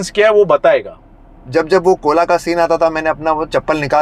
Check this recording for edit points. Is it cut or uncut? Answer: cut